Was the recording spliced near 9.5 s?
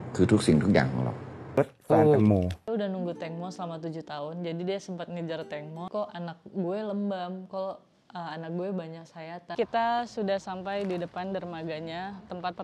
yes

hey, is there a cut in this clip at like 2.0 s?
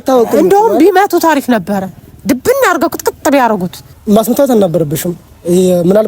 no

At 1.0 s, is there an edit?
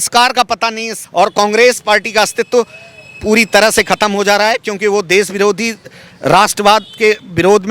yes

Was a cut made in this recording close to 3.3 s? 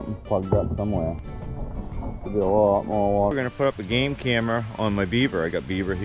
yes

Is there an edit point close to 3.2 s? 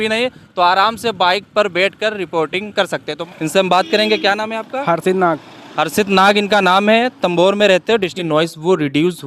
yes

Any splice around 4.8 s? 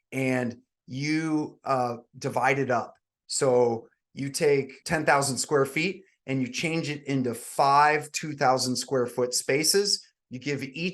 yes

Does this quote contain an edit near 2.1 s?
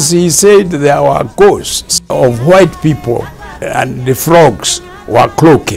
yes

